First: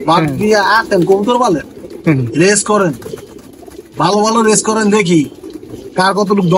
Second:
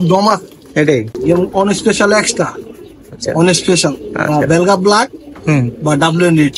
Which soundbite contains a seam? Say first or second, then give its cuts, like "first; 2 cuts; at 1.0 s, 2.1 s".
second; 1 cut; at 1.1 s